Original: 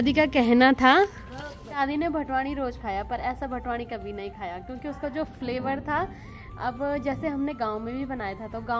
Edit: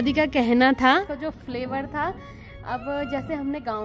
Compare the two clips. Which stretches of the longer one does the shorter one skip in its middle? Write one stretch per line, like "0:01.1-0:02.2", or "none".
0:01.0-0:04.9